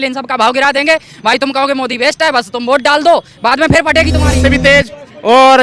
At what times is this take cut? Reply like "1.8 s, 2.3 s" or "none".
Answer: 4.4 s